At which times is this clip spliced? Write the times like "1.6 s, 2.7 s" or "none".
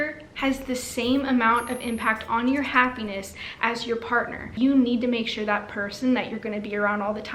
4.5 s